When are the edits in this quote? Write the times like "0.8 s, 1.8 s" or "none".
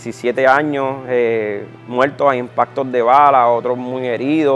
none